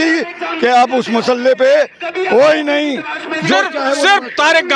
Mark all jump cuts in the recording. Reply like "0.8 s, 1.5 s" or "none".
none